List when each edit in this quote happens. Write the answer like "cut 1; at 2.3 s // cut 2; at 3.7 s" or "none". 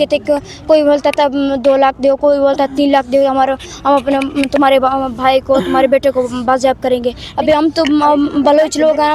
cut 1; at 7.2 s